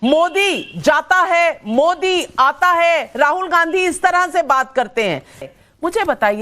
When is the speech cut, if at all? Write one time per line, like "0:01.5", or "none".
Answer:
0:05.4